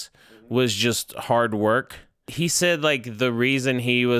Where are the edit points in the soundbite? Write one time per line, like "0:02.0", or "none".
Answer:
0:02.3